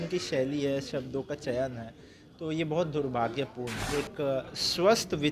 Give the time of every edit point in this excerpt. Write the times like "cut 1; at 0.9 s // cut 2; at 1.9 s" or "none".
cut 1; at 3.9 s